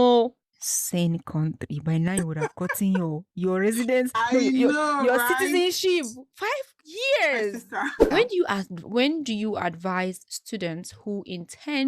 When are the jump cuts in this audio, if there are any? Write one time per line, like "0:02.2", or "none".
0:08.0